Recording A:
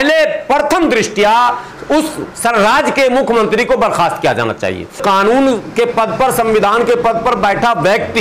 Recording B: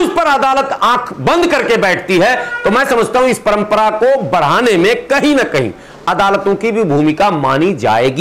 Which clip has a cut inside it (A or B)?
A